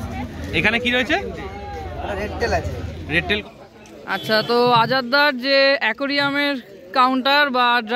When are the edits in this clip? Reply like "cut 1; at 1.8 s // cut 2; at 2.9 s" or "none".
cut 1; at 3.4 s